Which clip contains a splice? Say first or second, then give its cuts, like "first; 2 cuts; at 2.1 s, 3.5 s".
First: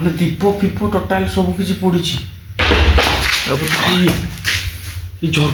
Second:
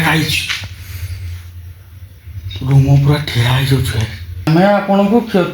second; 1 cut; at 4.5 s